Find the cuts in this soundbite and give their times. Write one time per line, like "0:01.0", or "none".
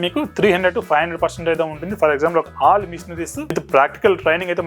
0:02.5
0:03.6